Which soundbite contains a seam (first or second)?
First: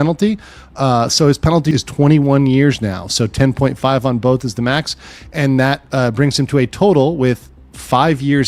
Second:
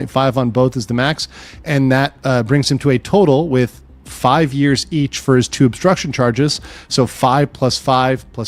first